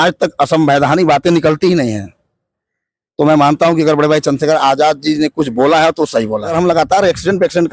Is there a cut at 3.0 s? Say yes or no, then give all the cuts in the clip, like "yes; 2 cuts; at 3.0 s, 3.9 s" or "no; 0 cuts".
no; 1 cut; at 6.5 s